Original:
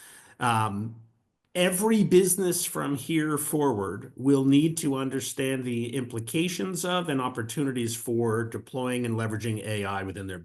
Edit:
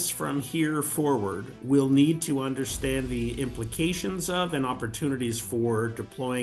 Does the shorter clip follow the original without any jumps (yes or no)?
yes